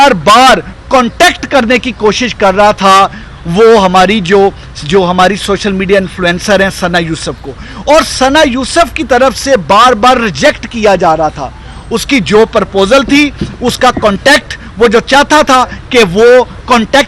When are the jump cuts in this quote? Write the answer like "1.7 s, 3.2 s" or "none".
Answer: none